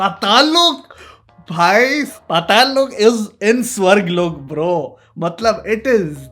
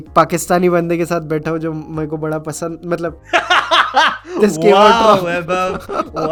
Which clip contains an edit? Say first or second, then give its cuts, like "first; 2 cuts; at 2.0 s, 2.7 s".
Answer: first; 1 cut; at 2.2 s